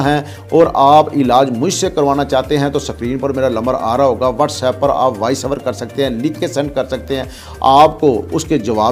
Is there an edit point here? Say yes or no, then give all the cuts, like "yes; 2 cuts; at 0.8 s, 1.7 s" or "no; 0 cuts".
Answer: no; 0 cuts